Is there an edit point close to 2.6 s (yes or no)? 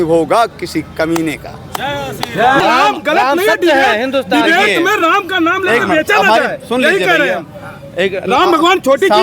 yes